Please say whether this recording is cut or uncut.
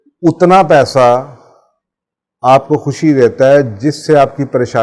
uncut